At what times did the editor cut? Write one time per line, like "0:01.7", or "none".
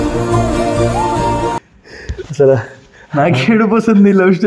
none